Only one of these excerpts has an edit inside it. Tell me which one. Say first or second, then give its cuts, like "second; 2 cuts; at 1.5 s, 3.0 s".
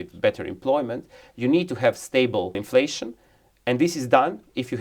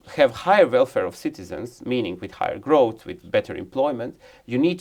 first; 1 cut; at 2.6 s